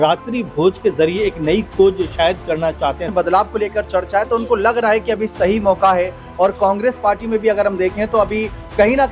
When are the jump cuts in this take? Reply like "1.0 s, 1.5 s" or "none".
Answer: 3.1 s

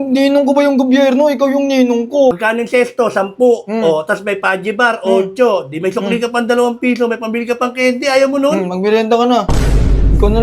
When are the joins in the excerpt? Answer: 2.4 s

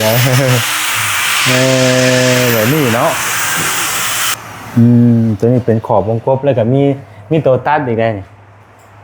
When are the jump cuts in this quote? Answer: 4.3 s

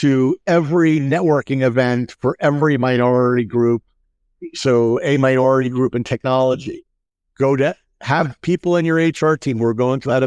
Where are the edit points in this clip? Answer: none

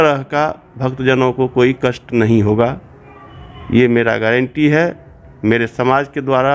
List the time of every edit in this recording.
none

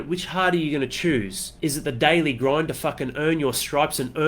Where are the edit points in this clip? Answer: 1.4 s

